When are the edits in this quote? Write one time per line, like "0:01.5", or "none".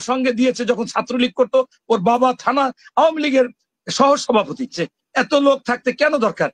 0:04.8